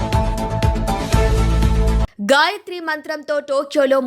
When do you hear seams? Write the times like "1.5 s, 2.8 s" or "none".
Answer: 2.1 s